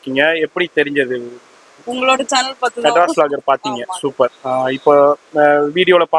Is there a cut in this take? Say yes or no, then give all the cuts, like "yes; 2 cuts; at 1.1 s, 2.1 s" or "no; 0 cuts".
no; 0 cuts